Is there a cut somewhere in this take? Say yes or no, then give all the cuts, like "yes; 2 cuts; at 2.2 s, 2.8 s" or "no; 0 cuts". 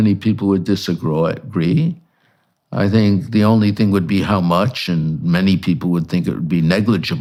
no; 0 cuts